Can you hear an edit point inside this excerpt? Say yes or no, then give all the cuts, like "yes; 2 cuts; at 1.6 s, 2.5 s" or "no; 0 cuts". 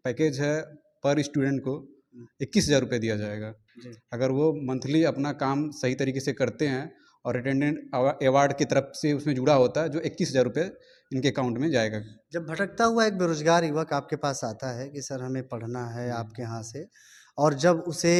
no; 0 cuts